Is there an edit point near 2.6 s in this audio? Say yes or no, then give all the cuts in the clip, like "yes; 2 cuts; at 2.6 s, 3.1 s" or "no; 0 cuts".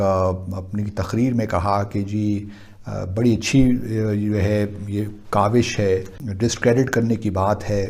no; 1 cut; at 6.2 s